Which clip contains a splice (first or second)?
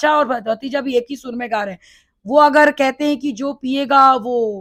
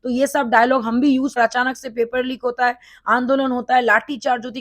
second